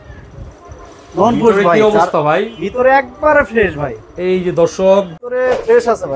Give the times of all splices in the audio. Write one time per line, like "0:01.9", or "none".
0:05.2